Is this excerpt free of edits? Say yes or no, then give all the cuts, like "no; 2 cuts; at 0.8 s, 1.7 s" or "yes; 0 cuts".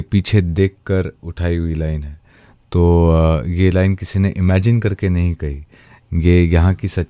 yes; 0 cuts